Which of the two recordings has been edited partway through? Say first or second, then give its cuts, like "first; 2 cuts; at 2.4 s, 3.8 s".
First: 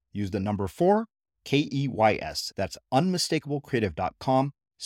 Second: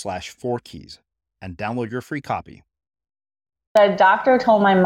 second; 1 cut; at 3.7 s